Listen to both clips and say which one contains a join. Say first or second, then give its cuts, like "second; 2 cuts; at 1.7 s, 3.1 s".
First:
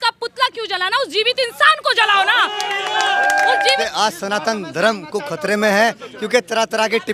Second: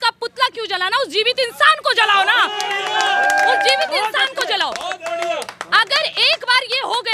first; 1 cut; at 3.9 s